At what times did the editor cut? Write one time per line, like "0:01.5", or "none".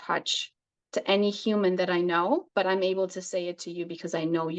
0:02.5